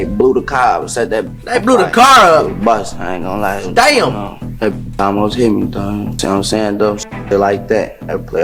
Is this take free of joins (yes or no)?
yes